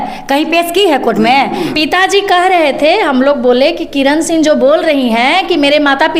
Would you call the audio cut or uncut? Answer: cut